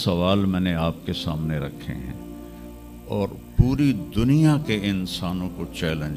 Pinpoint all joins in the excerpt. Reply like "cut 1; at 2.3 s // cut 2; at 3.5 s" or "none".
none